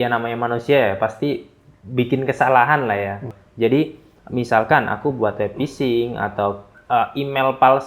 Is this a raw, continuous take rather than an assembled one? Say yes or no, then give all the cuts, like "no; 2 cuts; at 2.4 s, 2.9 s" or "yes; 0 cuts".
no; 1 cut; at 3.3 s